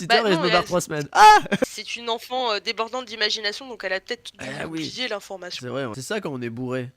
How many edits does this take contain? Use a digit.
2